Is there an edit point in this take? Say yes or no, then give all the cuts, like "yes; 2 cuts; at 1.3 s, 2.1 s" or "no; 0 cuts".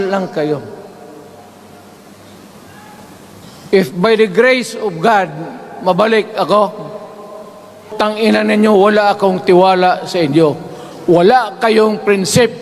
yes; 1 cut; at 7.9 s